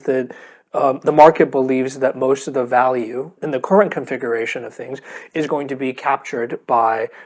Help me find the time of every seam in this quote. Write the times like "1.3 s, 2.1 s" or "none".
3.4 s